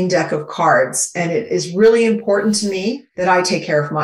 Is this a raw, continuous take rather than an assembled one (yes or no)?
no